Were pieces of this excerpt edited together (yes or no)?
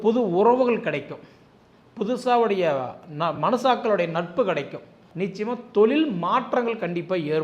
yes